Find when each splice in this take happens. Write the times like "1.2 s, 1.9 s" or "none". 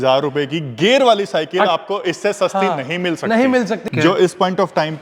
3.8 s